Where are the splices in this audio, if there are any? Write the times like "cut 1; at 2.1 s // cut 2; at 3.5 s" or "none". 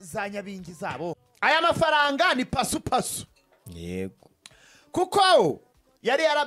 cut 1; at 1.3 s